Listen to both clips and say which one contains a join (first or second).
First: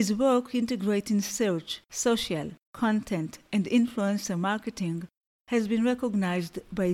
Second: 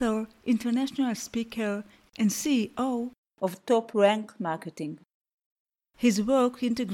second